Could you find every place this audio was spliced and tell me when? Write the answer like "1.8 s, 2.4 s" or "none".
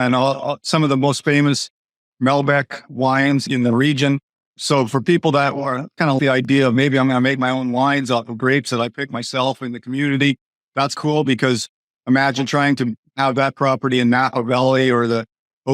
4.6 s

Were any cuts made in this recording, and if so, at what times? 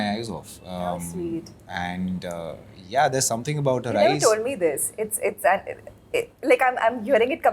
none

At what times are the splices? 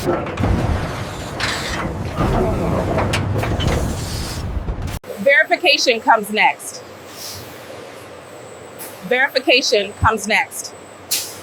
none

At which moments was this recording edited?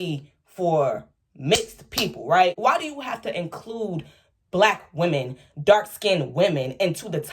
2.6 s

